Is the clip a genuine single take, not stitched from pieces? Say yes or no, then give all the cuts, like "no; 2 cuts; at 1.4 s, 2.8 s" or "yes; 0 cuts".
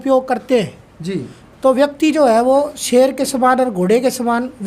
yes; 0 cuts